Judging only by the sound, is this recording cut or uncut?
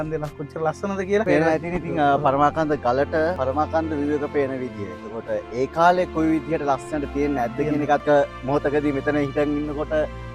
cut